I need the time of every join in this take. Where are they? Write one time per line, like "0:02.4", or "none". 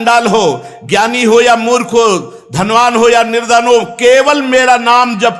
none